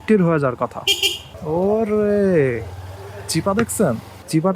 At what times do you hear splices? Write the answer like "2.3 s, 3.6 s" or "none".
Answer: 1.3 s